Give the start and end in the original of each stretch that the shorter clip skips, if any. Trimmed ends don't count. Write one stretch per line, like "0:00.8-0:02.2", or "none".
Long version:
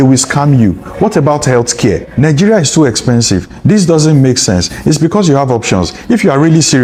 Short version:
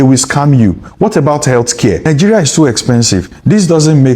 0:02.0-0:02.2